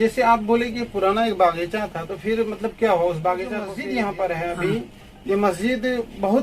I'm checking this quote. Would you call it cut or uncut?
cut